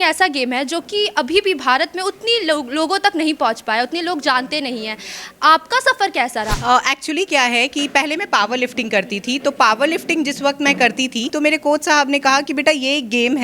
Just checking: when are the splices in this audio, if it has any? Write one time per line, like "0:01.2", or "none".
0:06.5
0:11.3